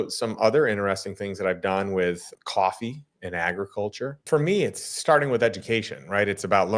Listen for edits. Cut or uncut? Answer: cut